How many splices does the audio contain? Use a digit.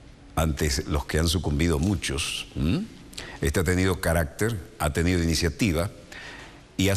1